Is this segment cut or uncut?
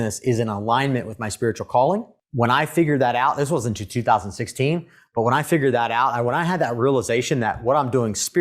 cut